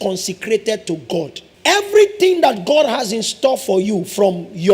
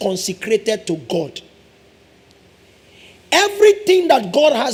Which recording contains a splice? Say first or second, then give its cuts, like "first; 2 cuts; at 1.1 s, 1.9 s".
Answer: first; 1 cut; at 1.4 s